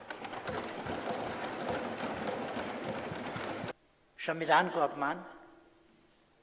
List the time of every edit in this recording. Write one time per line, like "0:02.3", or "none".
0:03.7